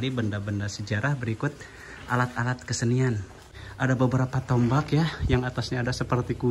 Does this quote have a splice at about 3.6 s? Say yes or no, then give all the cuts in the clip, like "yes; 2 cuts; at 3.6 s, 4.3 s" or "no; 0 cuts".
yes; 1 cut; at 3.6 s